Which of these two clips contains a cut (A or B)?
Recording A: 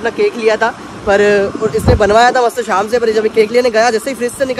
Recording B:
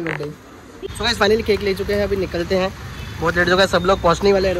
B